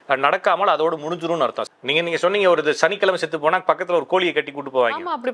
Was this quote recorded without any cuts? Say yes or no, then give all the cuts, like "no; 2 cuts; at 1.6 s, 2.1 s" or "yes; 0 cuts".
no; 1 cut; at 1.6 s